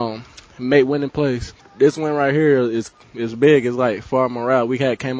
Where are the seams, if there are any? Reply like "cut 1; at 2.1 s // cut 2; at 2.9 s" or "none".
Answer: cut 1; at 1.6 s